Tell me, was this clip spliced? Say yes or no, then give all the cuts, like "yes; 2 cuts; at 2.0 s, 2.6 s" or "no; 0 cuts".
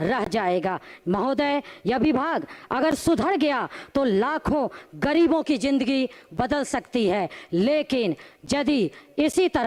no; 0 cuts